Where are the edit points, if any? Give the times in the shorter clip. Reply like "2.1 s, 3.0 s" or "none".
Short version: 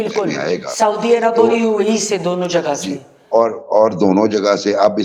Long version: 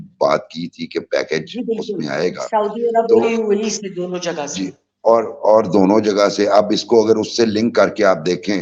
none